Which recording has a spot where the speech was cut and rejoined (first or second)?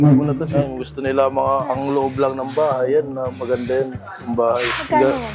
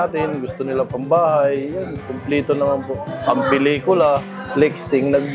second